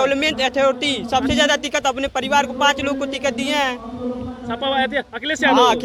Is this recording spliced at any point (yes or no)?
no